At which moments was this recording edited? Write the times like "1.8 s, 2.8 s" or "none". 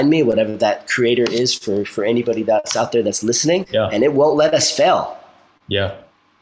3.7 s